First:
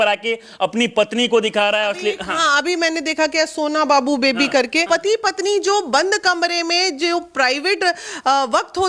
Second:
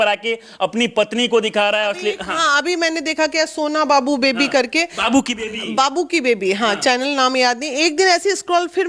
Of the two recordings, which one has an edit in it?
first; 1 cut; at 4.8 s

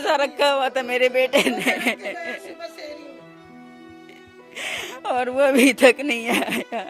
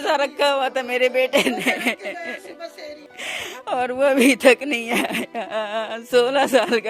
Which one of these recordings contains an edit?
second; 1 cut; at 3.1 s

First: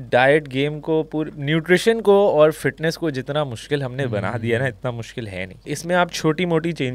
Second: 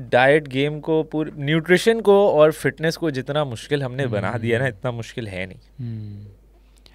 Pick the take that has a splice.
first; 1 cut; at 6.0 s

